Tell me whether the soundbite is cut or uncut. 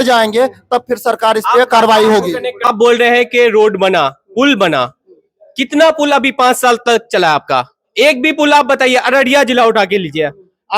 cut